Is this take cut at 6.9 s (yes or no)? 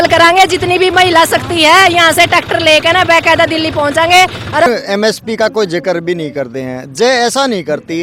no